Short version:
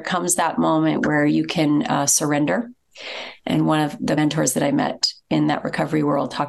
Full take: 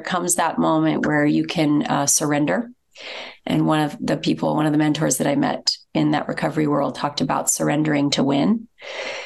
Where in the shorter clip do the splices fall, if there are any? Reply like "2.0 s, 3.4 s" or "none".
4.2 s